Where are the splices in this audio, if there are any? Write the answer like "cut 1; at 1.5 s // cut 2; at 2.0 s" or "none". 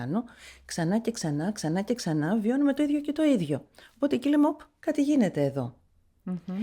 none